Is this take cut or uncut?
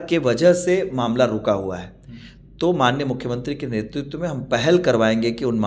uncut